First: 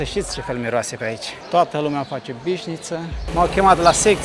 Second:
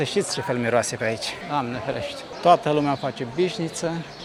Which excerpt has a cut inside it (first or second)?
first